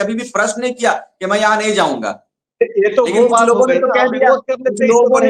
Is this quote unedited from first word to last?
yes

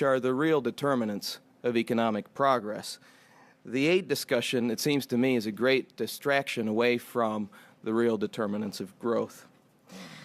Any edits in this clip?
yes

